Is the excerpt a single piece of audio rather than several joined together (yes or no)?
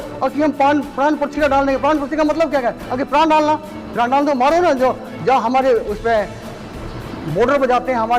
yes